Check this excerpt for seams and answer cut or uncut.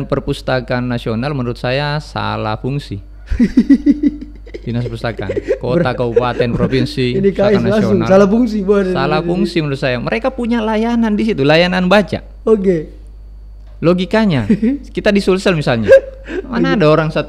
uncut